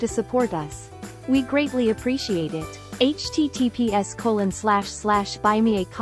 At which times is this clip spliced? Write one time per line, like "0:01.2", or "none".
none